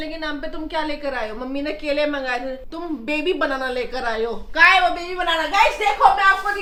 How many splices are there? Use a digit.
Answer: 0